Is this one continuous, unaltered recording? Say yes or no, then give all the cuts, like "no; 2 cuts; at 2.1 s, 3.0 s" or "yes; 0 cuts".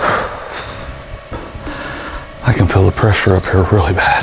no; 1 cut; at 1.3 s